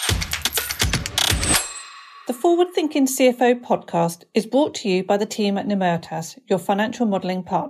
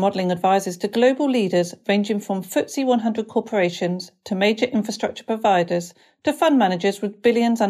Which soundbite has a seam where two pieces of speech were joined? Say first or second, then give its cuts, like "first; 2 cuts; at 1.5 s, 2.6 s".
first; 1 cut; at 2.0 s